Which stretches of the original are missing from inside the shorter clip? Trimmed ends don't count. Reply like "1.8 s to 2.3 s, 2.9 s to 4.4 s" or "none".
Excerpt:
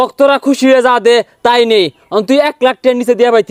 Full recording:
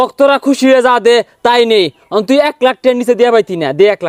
none